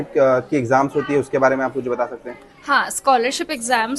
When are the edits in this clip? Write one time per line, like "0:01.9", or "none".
none